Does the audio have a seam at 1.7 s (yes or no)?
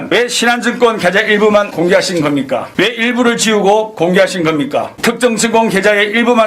yes